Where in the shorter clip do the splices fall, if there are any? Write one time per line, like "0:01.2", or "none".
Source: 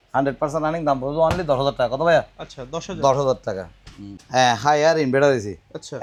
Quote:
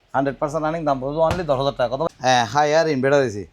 0:02.1